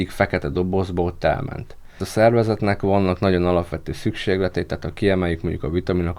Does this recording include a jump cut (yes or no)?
yes